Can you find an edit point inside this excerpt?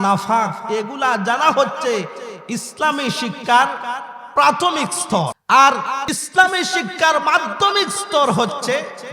yes; 2 cuts; at 5.4 s, 6.1 s

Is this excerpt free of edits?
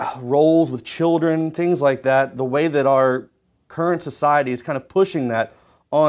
yes; 0 cuts

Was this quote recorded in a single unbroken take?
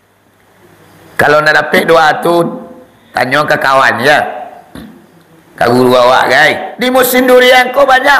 no; 1 cut; at 6.7 s

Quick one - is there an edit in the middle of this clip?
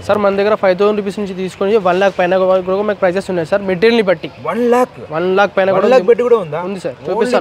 no; 0 cuts

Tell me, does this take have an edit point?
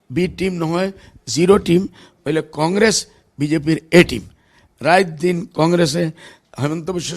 no; 0 cuts

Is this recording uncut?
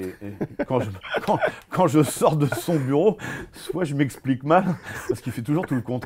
yes; 0 cuts

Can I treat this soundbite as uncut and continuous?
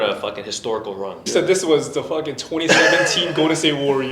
no; 1 cut; at 1.2 s

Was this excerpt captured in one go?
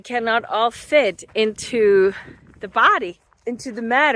no; 1 cut; at 3.3 s

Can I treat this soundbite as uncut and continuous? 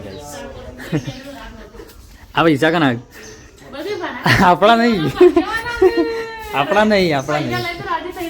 yes; 0 cuts

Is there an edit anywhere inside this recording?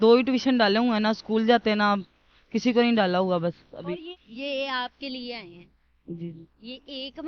yes; 1 cut; at 4.1 s

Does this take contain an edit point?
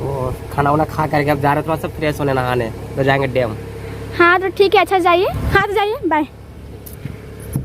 yes; 1 cut; at 5.4 s

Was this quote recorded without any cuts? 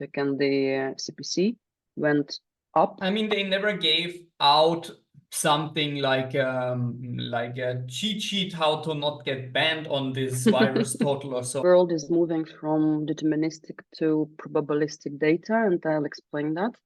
no; 2 cuts; at 3.1 s, 11.6 s

